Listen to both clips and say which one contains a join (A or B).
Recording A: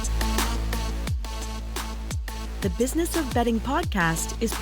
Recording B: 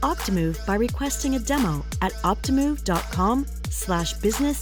A